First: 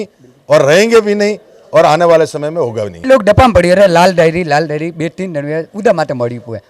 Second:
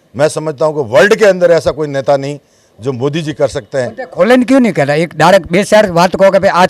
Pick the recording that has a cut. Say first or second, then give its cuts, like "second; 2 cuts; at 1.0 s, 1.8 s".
first; 1 cut; at 3.0 s